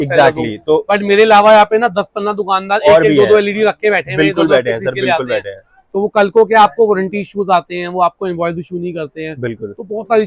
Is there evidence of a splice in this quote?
no; 0 cuts

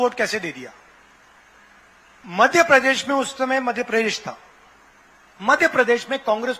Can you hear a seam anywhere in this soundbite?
yes; 1 cut; at 2.2 s

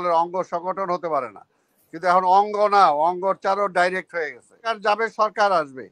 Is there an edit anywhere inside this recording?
yes; 1 cut; at 4.7 s

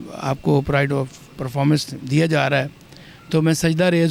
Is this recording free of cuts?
yes; 0 cuts

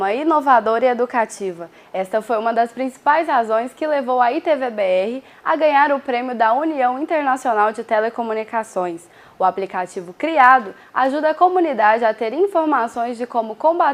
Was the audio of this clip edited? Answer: no; 0 cuts

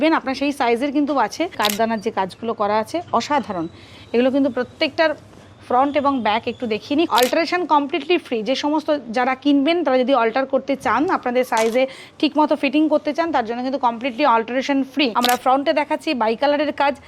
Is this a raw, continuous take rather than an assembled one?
no; 3 cuts; at 1.6 s, 7.1 s, 15.1 s

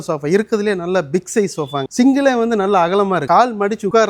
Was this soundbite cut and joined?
no; 0 cuts

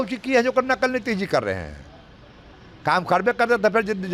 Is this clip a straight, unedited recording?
yes; 0 cuts

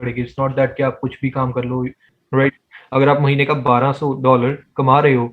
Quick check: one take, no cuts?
no; 1 cut; at 2.1 s

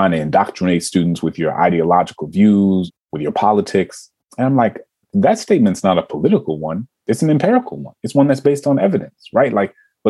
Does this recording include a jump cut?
yes; 3 cuts; at 2.9 s, 5.1 s, 6.9 s

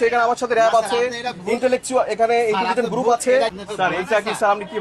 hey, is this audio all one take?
no; 1 cut; at 3.5 s

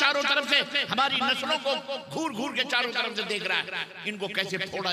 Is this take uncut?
yes; 0 cuts

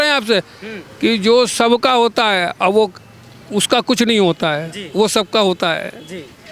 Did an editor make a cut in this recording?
no; 0 cuts

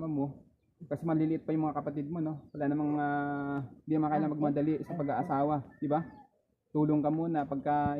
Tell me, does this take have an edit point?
no; 0 cuts

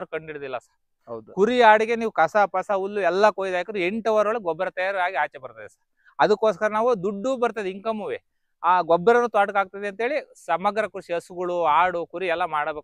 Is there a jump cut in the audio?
no; 0 cuts

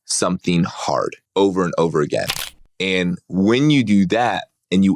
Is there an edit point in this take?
yes; 1 cut; at 1.2 s

